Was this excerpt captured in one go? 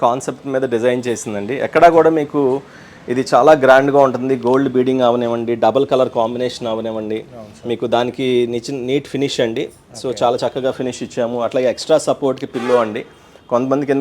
yes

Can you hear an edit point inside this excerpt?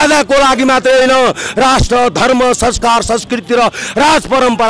no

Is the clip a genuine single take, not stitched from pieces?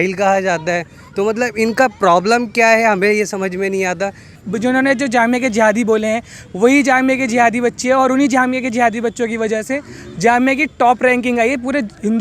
no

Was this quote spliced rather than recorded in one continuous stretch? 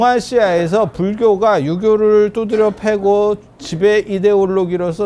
no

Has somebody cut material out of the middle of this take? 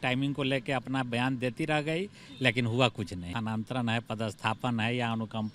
yes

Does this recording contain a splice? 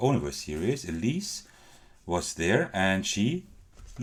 no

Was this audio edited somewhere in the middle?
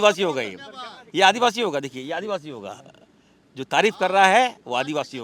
no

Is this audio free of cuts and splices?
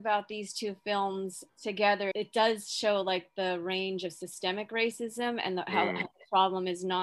no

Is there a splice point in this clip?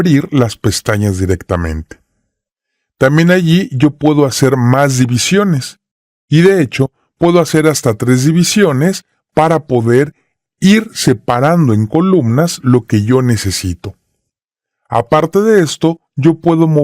yes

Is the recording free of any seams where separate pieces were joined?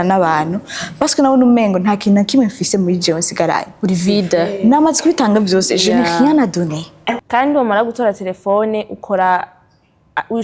no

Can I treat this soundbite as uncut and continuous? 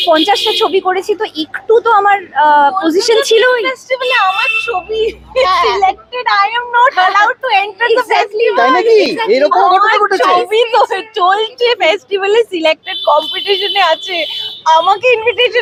yes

